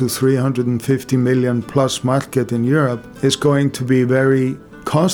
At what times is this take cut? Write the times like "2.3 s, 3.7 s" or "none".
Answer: 3.1 s